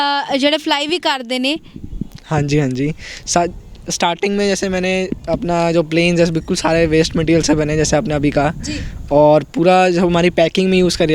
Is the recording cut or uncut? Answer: uncut